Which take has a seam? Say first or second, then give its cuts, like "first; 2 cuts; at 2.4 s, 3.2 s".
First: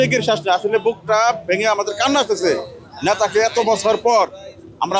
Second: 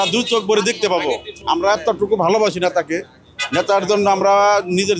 second; 1 cut; at 1.3 s